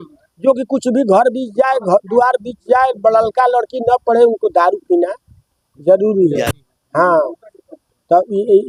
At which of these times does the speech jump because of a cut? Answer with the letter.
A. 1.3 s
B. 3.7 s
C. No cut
C